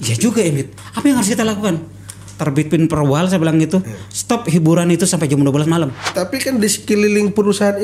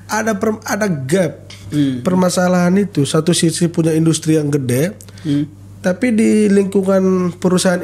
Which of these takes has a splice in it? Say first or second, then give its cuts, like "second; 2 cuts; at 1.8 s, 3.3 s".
first; 1 cut; at 6.1 s